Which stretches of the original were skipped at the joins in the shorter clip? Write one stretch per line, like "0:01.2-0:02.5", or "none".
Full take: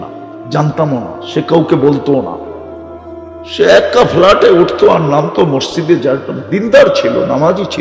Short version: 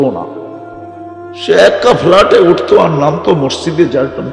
none